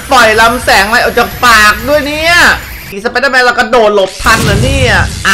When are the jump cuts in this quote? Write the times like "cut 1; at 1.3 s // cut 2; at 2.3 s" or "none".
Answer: cut 1; at 2.8 s

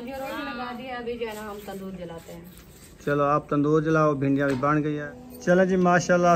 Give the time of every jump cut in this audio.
cut 1; at 5.0 s

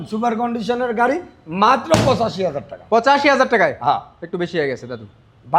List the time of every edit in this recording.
none

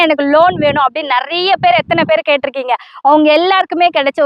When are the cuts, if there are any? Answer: none

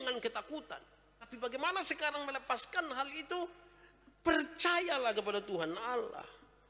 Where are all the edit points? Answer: cut 1; at 1.3 s

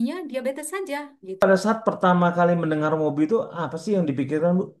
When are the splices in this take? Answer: cut 1; at 1.4 s

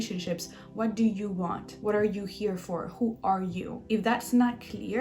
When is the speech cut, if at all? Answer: cut 1; at 1.7 s // cut 2; at 3.7 s

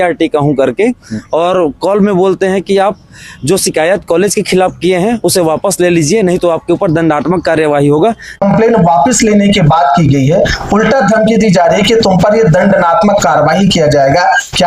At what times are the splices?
none

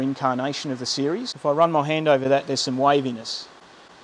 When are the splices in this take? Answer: cut 1; at 1.3 s

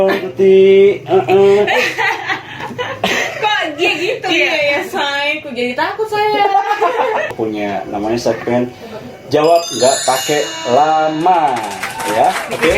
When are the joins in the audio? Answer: cut 1; at 2.0 s // cut 2; at 7.3 s

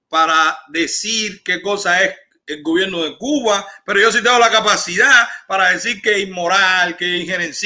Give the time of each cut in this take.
none

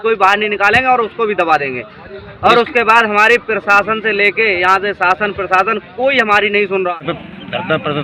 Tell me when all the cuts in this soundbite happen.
cut 1; at 7.0 s

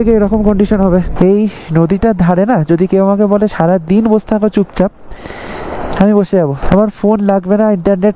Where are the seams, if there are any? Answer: cut 1; at 1.1 s // cut 2; at 6.6 s

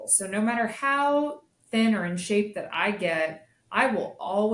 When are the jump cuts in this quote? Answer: none

